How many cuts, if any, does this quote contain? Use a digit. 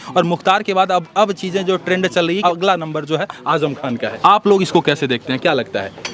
2